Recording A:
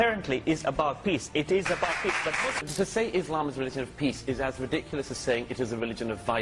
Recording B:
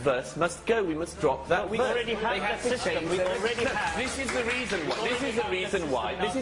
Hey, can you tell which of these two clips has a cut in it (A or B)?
A